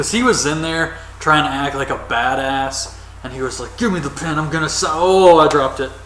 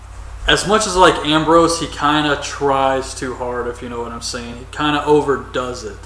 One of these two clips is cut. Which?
first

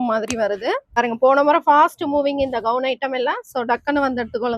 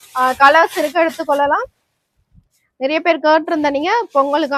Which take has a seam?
first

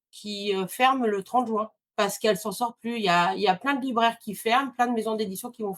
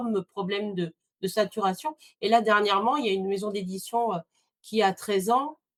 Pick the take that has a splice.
first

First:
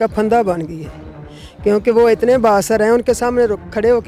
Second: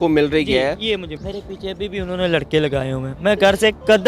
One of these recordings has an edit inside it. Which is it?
second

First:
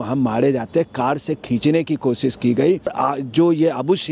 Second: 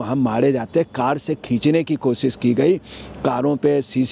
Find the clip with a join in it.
first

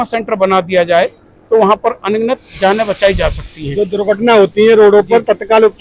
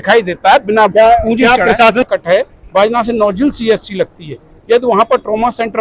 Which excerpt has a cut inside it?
second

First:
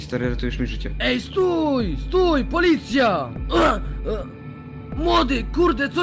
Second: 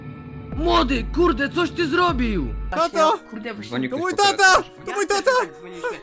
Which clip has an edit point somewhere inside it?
second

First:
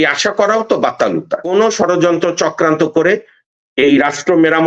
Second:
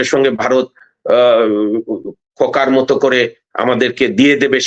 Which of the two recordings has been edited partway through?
first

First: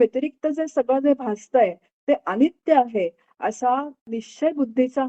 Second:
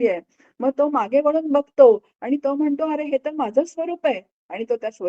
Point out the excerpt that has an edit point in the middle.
first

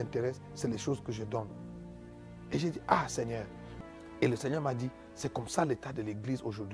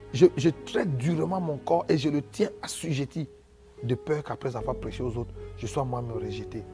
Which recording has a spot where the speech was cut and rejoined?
first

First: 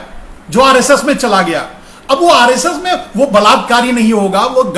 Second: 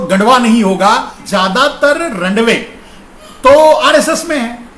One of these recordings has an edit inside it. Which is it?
second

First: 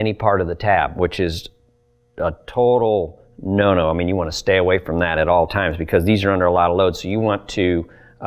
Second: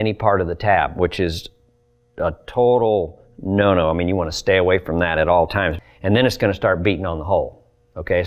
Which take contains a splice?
second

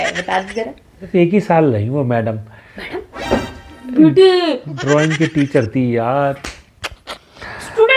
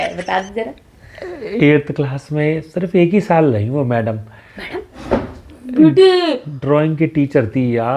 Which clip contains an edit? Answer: first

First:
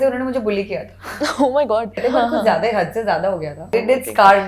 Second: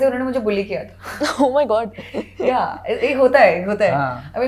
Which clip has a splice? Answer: first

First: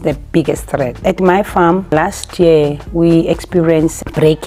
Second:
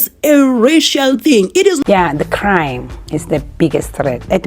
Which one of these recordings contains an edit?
second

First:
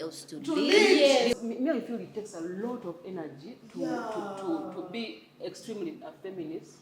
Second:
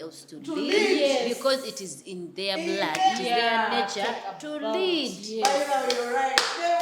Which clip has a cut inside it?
first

